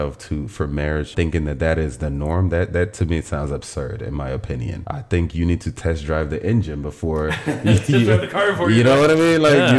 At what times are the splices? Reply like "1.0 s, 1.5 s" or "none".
1.1 s, 4.8 s